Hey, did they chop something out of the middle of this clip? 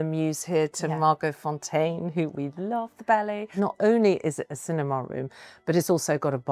yes; 1 cut; at 3.5 s

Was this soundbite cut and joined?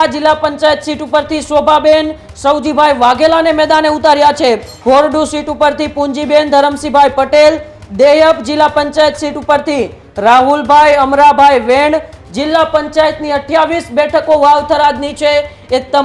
yes; 2 cuts; at 4.7 s, 12.2 s

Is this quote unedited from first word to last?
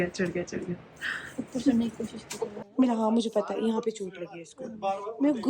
no; 1 cut; at 2.6 s

